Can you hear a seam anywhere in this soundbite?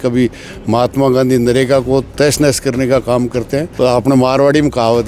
yes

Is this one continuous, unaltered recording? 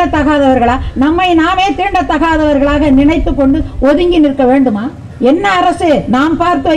no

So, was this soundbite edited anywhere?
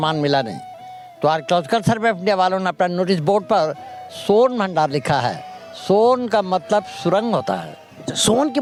no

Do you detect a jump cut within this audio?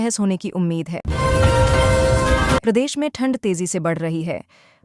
yes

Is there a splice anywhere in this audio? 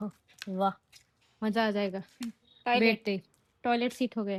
no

